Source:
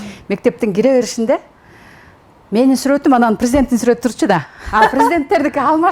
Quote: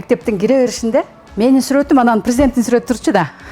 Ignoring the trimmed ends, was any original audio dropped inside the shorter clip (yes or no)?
yes